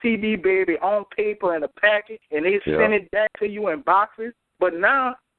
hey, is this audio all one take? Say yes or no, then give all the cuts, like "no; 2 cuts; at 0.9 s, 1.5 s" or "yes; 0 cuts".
no; 1 cut; at 2.2 s